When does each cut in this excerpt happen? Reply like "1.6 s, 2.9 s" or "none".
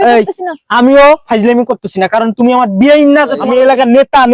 3.4 s